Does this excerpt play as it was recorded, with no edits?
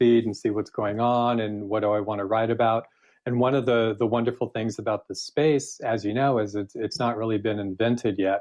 yes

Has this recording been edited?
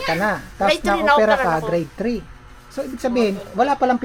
no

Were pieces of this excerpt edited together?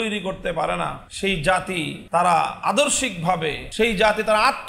yes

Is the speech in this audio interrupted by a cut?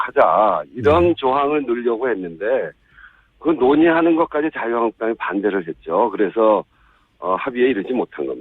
yes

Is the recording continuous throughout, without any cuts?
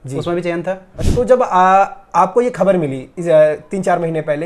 no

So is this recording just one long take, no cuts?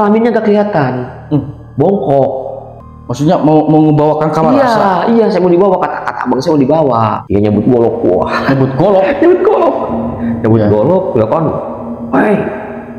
no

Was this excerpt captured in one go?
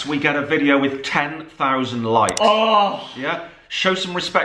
yes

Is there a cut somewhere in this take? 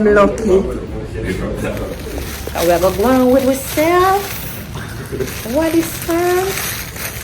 yes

